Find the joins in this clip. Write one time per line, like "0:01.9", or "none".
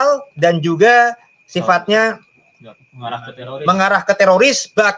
none

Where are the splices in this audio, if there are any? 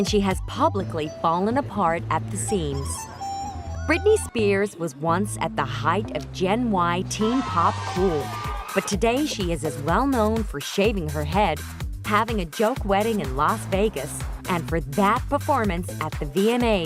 0:08.3

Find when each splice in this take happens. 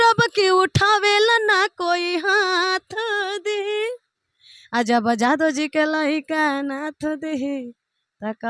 none

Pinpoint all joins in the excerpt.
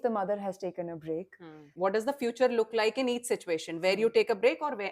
0:01.7

